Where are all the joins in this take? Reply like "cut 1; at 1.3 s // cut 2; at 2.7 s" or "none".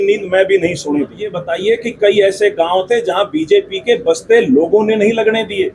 cut 1; at 1.4 s